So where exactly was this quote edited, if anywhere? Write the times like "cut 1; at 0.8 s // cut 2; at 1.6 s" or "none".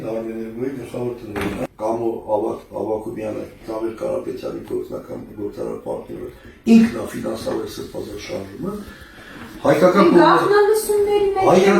cut 1; at 1.6 s